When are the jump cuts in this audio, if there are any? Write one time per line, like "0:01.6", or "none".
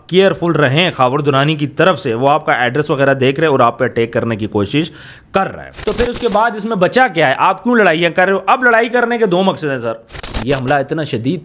0:05.7
0:10.2